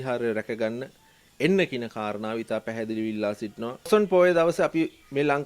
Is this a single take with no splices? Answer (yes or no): no